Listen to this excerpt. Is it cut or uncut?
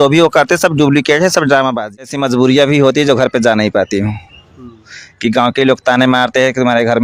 cut